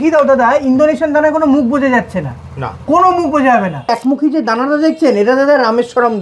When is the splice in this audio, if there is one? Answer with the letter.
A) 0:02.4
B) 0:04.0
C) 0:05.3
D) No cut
B